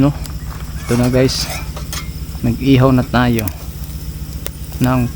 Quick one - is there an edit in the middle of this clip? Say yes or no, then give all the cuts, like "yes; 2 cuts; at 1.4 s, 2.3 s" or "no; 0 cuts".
no; 0 cuts